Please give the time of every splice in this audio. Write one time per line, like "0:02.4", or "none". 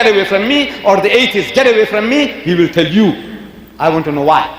none